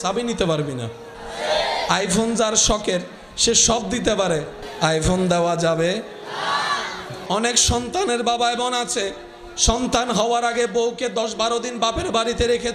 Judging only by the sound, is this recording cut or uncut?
cut